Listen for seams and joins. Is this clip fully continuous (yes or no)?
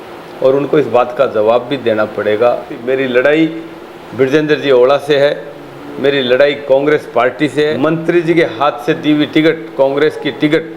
no